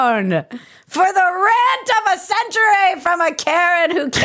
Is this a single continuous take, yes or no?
yes